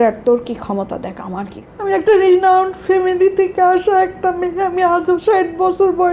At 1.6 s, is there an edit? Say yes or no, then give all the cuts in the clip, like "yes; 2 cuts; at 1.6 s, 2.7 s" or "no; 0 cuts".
yes; 1 cut; at 1.6 s